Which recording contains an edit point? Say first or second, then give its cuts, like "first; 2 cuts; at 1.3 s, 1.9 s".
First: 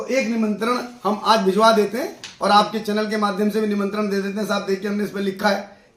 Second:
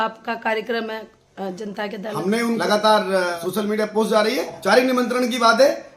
second; 3 cuts; at 2.6 s, 3.3 s, 4.6 s